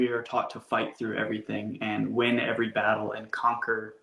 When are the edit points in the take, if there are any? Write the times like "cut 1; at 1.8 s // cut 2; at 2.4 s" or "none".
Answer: none